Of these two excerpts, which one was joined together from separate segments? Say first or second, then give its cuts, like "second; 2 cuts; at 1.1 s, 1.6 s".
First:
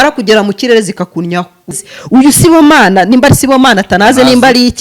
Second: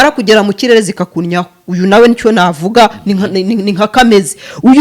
first; 1 cut; at 1.8 s